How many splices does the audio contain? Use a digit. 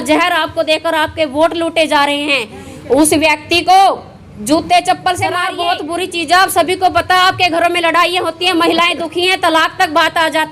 1